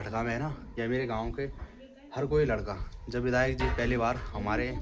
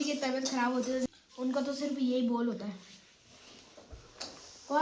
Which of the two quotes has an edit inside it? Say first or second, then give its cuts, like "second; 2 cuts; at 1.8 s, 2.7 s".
second; 1 cut; at 1.1 s